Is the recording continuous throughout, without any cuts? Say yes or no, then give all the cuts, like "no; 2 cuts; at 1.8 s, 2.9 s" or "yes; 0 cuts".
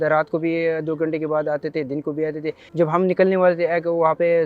no; 1 cut; at 2.7 s